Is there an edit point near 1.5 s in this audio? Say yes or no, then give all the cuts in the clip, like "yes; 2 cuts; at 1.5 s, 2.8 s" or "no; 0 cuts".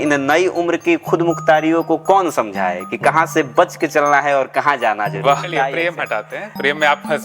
no; 1 cut; at 5.5 s